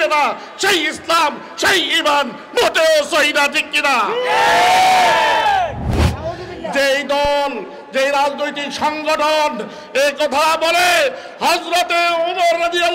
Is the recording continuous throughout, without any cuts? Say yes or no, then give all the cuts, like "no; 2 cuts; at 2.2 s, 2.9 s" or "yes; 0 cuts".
no; 1 cut; at 5.9 s